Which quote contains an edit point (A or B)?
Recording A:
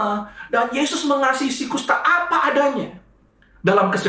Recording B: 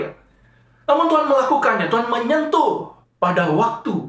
B